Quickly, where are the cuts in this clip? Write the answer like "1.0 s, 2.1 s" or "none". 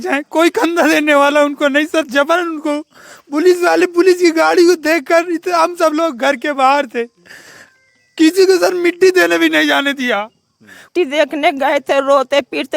10.9 s